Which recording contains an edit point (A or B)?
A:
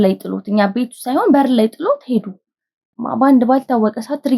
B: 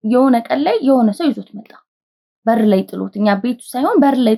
A